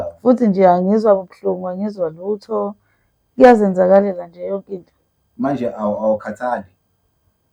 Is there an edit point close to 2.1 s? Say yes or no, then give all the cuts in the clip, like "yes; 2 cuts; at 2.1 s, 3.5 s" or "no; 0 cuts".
no; 0 cuts